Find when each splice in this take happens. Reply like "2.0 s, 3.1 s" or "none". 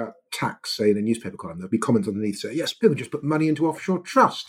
1.5 s, 2.7 s

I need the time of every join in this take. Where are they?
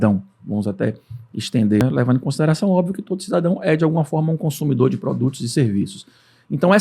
1.8 s

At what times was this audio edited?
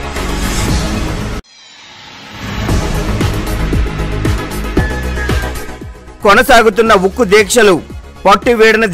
5.5 s

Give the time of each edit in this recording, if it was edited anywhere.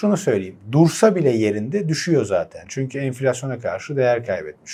none

